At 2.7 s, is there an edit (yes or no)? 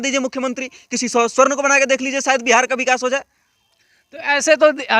no